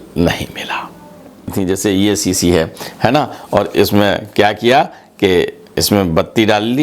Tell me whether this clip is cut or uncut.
cut